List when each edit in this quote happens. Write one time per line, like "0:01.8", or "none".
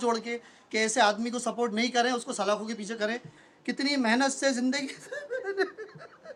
none